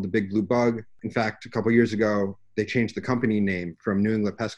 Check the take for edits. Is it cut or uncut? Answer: uncut